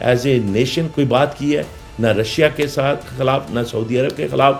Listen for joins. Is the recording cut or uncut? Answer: uncut